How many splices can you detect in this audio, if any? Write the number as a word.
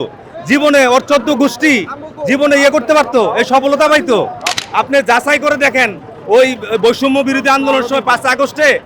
one